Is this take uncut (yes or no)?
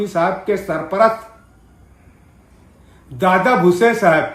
yes